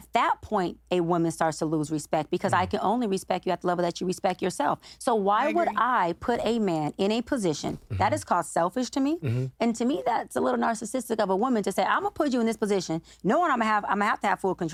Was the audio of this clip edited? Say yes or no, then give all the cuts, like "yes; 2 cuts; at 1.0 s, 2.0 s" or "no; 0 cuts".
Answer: no; 0 cuts